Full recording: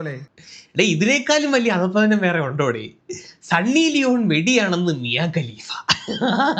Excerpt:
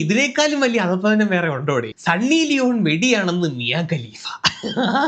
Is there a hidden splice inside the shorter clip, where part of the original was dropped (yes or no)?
yes